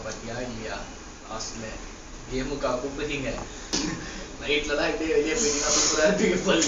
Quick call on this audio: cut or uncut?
cut